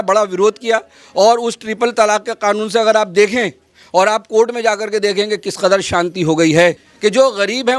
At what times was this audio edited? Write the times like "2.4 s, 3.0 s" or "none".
6.9 s